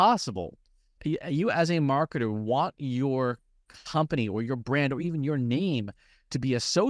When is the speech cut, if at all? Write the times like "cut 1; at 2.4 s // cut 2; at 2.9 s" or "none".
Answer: cut 1; at 1.0 s